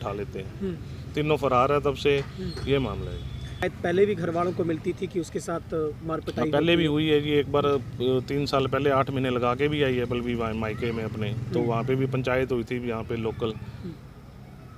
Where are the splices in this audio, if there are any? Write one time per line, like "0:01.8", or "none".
0:03.6